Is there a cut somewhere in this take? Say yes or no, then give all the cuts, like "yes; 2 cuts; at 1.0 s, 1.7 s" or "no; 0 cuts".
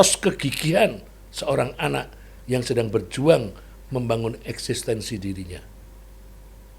no; 0 cuts